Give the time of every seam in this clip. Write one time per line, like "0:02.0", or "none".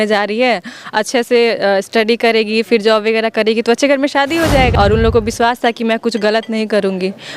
0:04.7